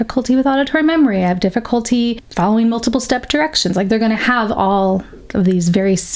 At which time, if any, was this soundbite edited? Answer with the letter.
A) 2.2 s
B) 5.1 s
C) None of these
A